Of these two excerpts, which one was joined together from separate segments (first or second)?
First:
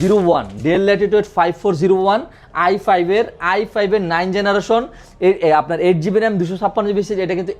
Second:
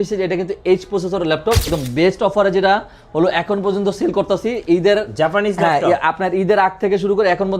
second